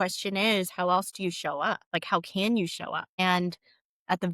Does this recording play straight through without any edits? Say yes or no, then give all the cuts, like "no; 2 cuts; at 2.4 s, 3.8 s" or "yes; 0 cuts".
no; 2 cuts; at 1.8 s, 3.1 s